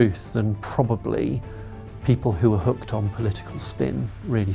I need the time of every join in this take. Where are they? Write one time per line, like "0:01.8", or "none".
none